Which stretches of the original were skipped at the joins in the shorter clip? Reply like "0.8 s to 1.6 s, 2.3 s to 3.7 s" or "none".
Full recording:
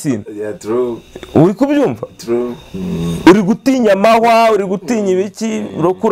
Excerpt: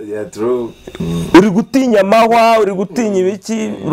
1.2 s to 2.9 s